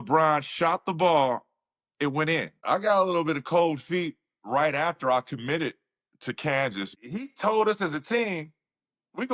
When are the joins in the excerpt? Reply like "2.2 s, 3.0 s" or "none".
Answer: 2.6 s, 6.9 s